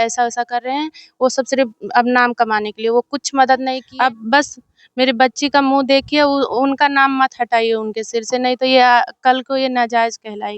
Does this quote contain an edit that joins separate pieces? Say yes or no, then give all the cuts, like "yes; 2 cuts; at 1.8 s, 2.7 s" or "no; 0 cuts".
yes; 1 cut; at 3.8 s